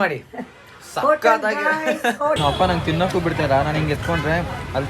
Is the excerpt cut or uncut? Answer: cut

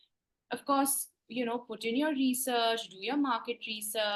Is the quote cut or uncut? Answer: uncut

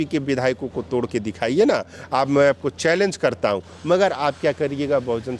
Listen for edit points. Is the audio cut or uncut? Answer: uncut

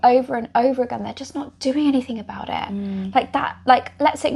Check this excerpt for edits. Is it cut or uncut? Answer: uncut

